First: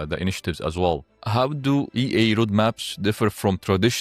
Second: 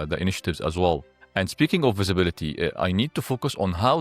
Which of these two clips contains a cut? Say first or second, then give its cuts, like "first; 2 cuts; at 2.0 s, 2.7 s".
first; 1 cut; at 1.1 s